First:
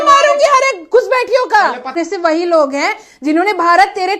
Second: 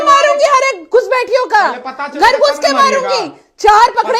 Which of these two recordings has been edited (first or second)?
first